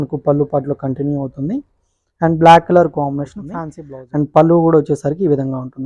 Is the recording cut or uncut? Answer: cut